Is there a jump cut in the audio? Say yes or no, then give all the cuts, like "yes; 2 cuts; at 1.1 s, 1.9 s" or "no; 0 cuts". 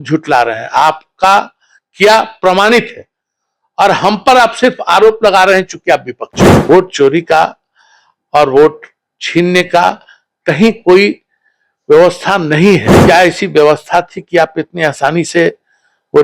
yes; 2 cuts; at 6.7 s, 12.9 s